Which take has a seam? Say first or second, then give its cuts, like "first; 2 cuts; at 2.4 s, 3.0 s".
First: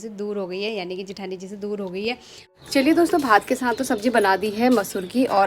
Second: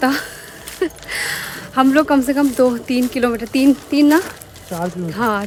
first; 1 cut; at 2.4 s